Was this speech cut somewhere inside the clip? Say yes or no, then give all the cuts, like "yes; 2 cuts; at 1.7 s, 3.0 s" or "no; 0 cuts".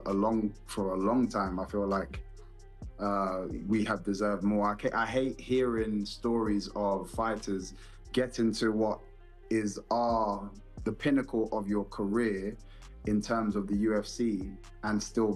no; 0 cuts